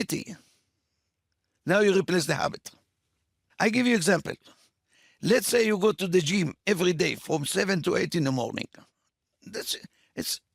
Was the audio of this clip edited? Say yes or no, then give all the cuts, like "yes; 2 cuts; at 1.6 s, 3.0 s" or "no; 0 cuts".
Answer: yes; 1 cut; at 3.4 s